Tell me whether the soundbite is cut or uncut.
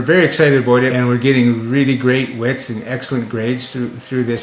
cut